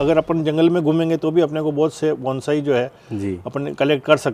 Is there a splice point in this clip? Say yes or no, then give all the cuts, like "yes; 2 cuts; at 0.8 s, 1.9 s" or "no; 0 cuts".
no; 0 cuts